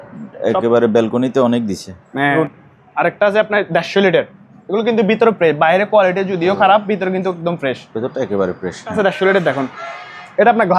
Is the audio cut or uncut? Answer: cut